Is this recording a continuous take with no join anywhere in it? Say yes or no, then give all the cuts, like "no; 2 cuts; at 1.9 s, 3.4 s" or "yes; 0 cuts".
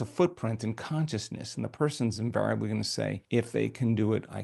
no; 1 cut; at 3.2 s